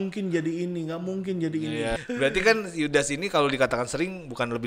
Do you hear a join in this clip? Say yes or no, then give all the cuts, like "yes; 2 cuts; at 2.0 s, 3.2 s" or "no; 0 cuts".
yes; 1 cut; at 2.0 s